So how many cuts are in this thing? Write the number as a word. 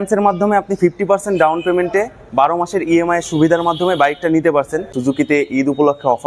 one